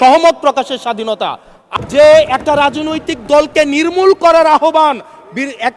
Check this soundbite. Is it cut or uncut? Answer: cut